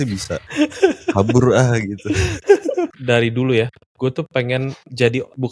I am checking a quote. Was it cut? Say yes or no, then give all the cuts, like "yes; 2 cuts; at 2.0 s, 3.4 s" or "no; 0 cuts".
yes; 1 cut; at 2.9 s